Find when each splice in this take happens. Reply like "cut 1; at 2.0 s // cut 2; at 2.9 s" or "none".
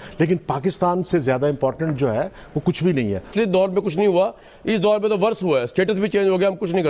cut 1; at 3.3 s

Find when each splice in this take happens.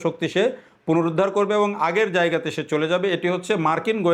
none

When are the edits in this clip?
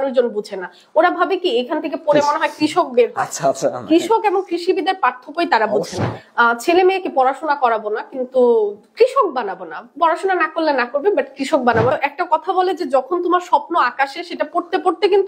cut 1; at 6.2 s // cut 2; at 11.9 s

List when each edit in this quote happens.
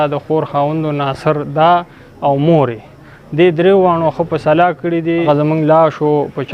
cut 1; at 4.8 s

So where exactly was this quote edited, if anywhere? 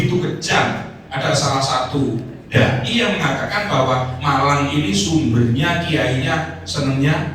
none

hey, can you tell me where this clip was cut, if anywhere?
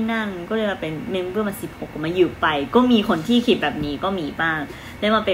none

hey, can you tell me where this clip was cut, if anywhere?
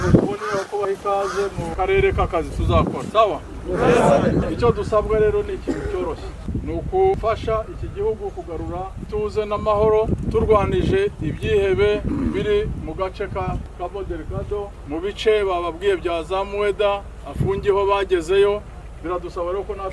none

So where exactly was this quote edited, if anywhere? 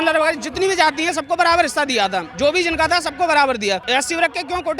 cut 1; at 3.8 s

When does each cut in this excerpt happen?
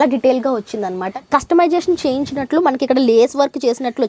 cut 1; at 1.0 s

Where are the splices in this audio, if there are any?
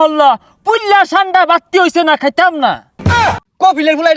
cut 1; at 3.1 s

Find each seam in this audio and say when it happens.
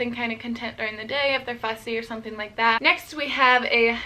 cut 1; at 2.8 s

